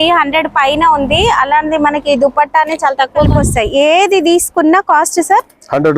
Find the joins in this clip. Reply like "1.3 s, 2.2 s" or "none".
3.3 s